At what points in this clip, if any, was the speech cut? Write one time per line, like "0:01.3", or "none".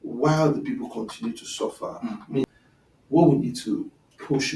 0:02.5